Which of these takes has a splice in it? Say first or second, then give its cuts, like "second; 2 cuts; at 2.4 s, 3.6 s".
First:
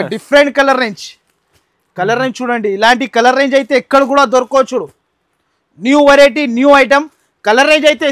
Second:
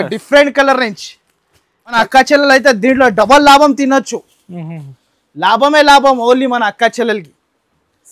second; 1 cut; at 1.9 s